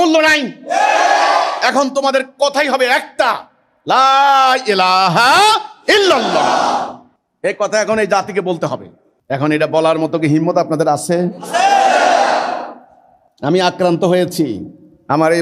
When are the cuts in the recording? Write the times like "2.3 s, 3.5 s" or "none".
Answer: none

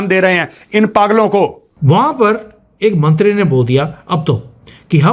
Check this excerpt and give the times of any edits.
1.7 s

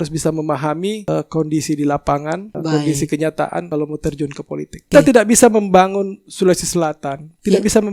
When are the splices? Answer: 1.0 s, 2.5 s, 3.7 s, 4.9 s

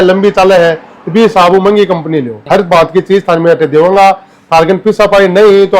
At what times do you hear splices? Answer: 2.4 s

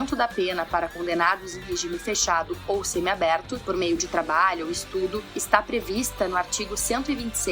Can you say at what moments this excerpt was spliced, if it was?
none

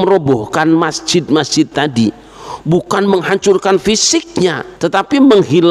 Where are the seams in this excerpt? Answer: 4.7 s

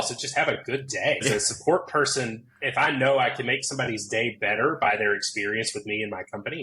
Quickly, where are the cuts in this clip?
1.2 s

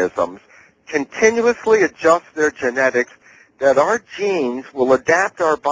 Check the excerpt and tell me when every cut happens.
none

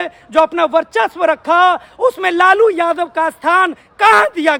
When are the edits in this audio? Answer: none

